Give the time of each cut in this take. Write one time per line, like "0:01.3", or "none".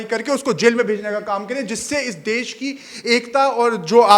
none